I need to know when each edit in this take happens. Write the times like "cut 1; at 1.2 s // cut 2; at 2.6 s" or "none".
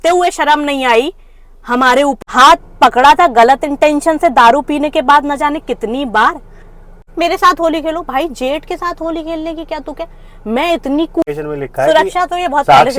cut 1; at 2.2 s // cut 2; at 7.1 s // cut 3; at 11.2 s